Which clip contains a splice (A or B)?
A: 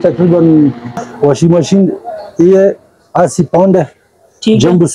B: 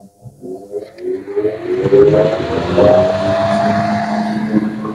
A